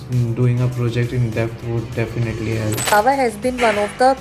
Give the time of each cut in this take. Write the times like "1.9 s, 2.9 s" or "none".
2.9 s